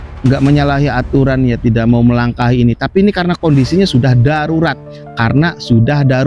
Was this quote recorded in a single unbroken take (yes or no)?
yes